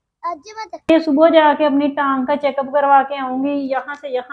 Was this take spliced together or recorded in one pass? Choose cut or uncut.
cut